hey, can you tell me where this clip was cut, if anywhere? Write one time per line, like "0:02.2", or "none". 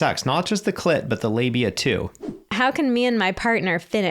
0:02.4